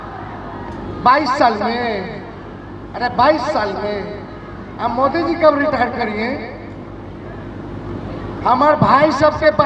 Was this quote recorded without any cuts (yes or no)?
yes